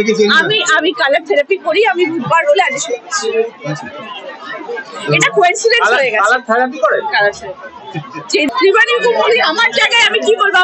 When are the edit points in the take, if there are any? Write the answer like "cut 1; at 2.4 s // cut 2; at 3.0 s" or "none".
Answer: cut 1; at 8.5 s